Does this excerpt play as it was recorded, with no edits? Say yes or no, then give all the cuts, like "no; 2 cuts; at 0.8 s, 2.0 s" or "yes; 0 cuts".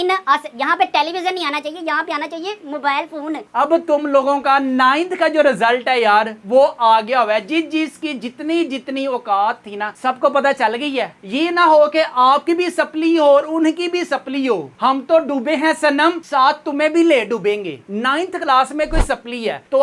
no; 3 cuts; at 3.4 s, 11.2 s, 17.8 s